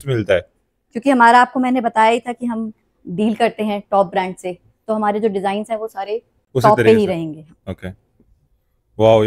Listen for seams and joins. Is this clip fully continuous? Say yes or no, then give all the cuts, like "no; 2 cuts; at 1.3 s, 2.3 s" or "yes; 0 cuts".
yes; 0 cuts